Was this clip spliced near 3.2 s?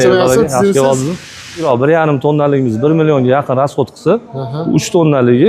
no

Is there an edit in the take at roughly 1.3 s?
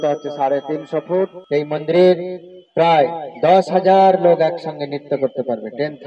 yes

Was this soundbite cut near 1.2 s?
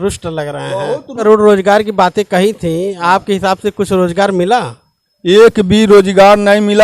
yes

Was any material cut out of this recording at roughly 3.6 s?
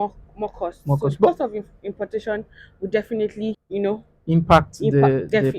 yes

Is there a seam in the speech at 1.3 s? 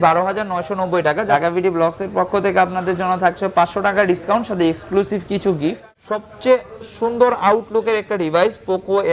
yes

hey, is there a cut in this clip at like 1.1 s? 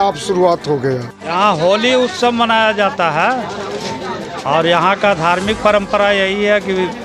yes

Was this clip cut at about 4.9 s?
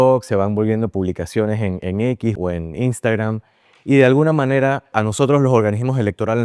yes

